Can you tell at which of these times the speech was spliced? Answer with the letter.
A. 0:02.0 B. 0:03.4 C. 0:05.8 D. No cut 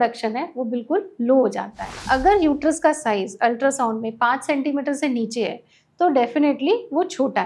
A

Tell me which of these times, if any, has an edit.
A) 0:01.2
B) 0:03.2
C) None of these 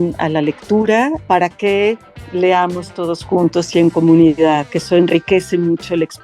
A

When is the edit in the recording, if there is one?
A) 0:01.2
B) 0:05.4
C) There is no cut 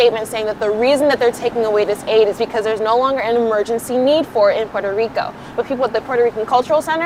C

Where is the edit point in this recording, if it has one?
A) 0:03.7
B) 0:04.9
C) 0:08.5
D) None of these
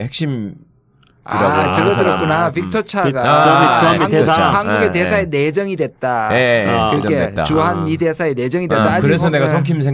C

